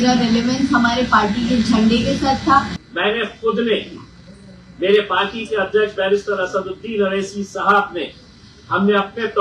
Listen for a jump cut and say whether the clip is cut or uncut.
cut